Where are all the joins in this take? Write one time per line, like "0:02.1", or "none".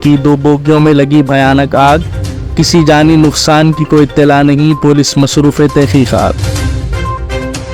0:06.4